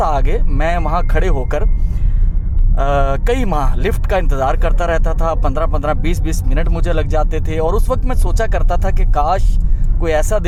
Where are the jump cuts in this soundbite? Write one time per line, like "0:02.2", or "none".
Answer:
none